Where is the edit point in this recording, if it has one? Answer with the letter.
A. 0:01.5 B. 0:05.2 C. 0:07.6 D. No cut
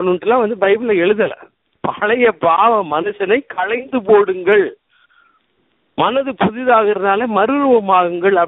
D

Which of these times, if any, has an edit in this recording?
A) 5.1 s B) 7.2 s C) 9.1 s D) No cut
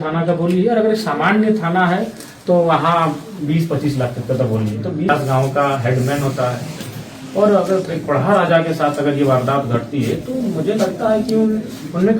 A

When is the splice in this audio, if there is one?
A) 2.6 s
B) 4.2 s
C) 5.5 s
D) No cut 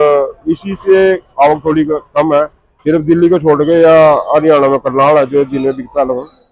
A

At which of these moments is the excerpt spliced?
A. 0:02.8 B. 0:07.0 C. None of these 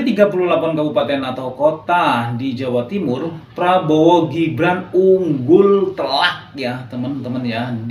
C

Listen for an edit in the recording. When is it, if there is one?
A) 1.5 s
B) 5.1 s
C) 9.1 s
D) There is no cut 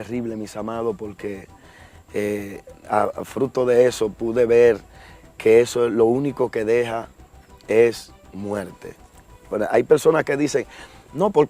C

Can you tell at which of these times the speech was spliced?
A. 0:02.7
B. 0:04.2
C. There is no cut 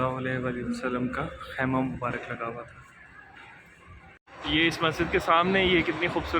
B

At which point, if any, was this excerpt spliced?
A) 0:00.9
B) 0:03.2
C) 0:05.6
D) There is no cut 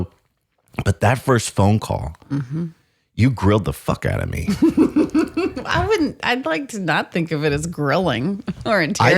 D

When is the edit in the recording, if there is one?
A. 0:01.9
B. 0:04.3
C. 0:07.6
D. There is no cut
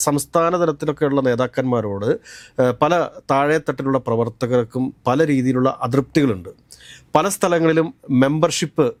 D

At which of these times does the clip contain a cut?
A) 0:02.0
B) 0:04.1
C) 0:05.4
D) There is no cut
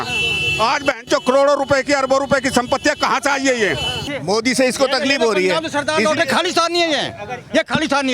B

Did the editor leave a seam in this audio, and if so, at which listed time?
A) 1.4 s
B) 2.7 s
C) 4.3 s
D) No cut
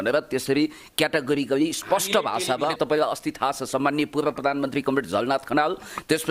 B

